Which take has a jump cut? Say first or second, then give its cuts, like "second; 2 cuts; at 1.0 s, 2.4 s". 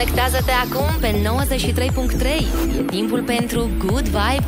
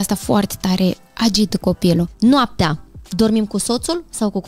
second; 1 cut; at 2.1 s